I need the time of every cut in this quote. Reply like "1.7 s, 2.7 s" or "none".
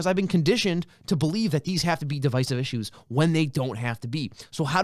none

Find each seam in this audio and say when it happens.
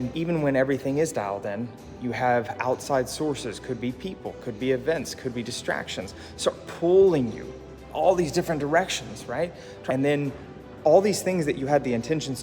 9.7 s

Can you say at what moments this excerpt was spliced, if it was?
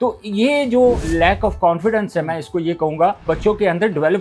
1.0 s, 3.2 s

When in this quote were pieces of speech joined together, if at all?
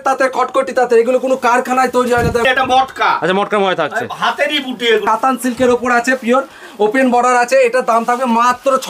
2.4 s, 5.0 s

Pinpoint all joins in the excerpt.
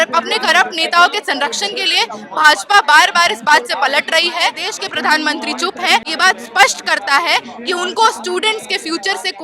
4.7 s, 6.1 s

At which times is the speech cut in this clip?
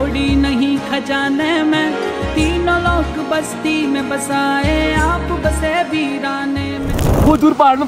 6.9 s

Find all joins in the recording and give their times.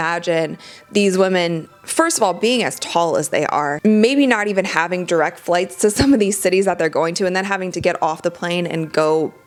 none

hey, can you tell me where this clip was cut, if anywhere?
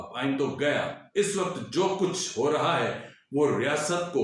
1.0 s

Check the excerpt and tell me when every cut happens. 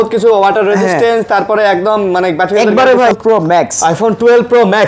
3.1 s

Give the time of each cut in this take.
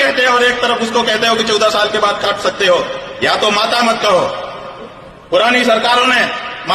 none

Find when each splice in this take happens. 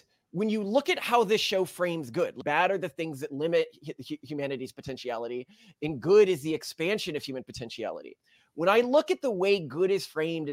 2.4 s

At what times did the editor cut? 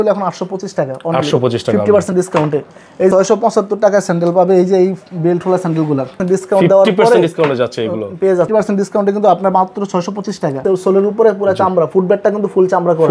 3.1 s, 6.2 s, 8.5 s, 10.6 s

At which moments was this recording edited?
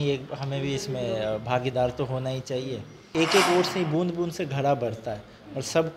3.1 s

